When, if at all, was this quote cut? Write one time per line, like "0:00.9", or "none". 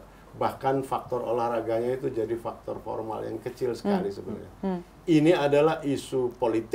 none